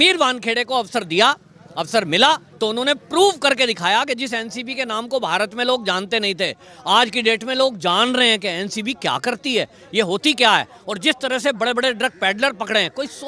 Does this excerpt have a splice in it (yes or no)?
no